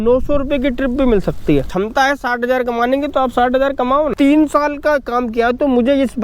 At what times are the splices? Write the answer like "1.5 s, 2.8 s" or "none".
1.7 s, 4.1 s